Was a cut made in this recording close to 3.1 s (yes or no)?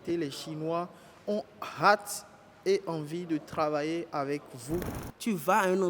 no